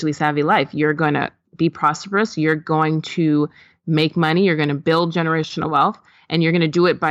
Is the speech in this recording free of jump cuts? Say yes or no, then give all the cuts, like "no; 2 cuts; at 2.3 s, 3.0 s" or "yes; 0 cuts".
yes; 0 cuts